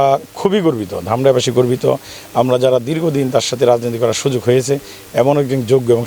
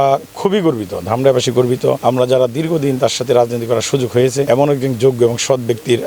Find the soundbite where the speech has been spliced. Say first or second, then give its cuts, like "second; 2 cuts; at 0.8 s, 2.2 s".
second; 2 cuts; at 2.0 s, 4.5 s